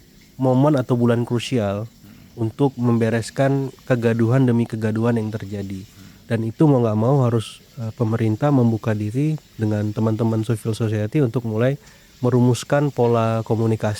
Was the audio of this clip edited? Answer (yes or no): no